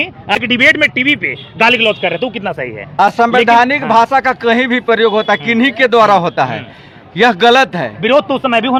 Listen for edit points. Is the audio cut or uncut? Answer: uncut